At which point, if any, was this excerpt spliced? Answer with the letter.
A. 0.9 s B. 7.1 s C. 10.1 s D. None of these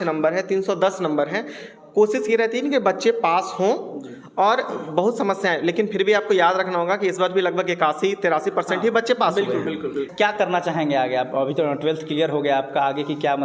C